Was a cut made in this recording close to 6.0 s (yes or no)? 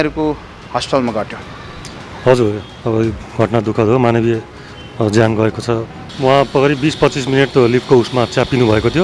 yes